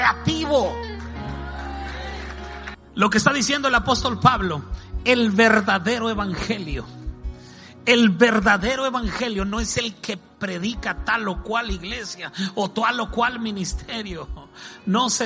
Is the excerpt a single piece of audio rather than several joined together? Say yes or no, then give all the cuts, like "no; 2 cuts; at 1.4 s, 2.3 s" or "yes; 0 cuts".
no; 1 cut; at 2.7 s